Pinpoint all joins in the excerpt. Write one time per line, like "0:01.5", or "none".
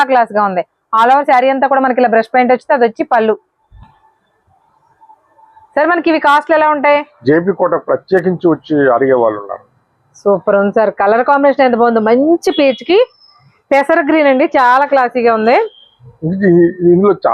0:07.1